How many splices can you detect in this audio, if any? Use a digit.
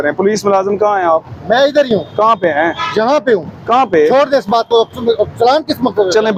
0